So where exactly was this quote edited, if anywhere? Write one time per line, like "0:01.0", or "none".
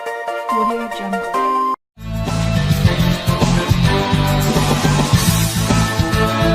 0:01.9